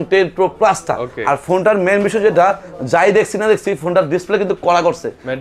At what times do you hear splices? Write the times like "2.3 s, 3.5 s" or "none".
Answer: none